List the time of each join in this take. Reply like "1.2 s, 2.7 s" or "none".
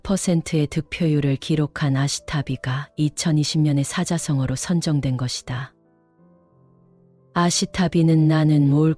5.8 s, 7.2 s